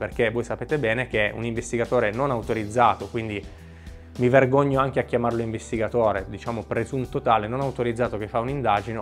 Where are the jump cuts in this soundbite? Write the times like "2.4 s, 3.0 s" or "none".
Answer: none

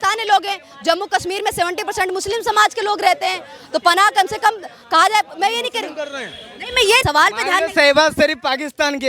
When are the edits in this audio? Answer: 7.0 s

